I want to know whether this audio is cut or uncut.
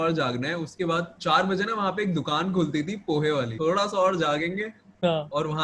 cut